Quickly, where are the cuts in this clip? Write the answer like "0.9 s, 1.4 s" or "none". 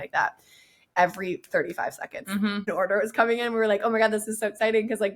0.9 s, 2.7 s